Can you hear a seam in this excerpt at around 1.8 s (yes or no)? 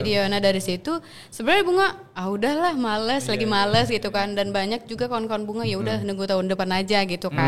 no